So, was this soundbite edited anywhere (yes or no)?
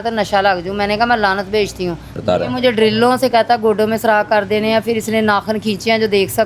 yes